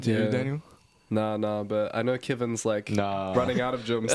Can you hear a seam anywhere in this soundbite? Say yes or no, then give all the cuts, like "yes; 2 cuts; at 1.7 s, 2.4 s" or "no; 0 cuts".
no; 0 cuts